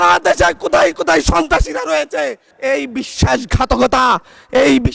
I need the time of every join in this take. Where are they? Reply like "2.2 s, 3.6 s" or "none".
2.5 s